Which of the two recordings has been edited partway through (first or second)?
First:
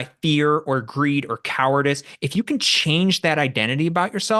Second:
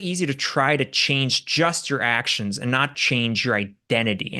second